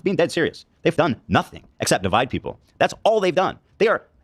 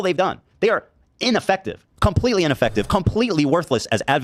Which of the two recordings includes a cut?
first; 2 cuts; at 0.9 s, 2.0 s

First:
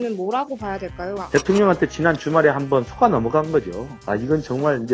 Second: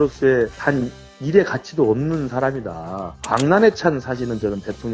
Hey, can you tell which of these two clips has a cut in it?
first; 2 cuts; at 1.2 s, 3.9 s

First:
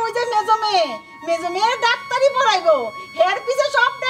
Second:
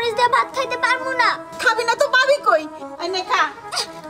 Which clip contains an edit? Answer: second; 1 cut; at 2.8 s

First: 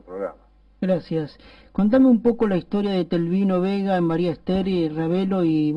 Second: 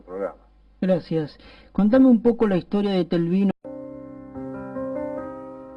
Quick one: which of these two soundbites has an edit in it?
first; 1 cut; at 3.5 s

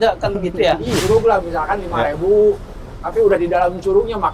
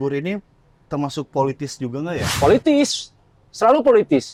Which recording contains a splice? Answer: first; 1 cut; at 1.0 s

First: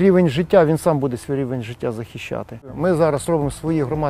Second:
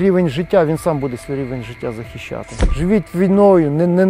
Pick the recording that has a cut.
second; 1 cut; at 2.6 s

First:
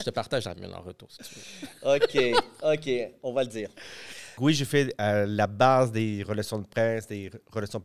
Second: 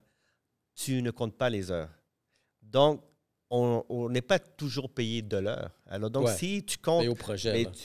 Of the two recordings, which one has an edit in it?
first; 1 cut; at 4.3 s

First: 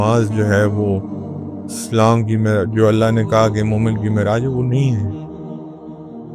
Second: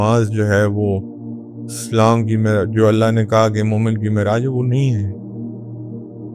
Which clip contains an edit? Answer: first; 1 cut; at 5.0 s

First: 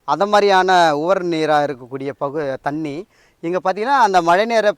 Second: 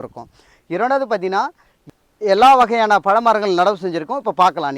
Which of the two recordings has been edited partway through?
second; 1 cut; at 1.7 s

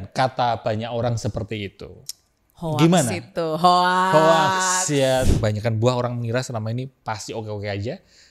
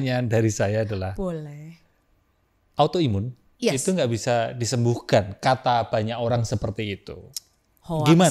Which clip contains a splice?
first; 1 cut; at 5.3 s

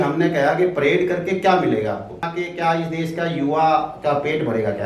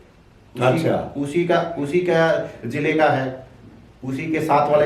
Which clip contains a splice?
first; 1 cut; at 2.3 s

